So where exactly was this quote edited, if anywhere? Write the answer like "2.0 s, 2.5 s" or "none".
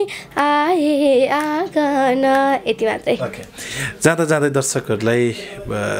none